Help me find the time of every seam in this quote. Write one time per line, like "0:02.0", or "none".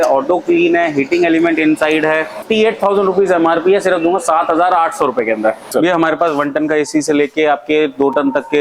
0:02.5
0:05.7

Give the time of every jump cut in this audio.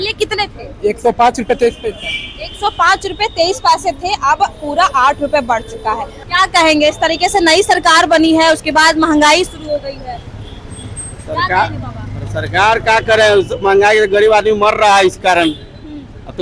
none

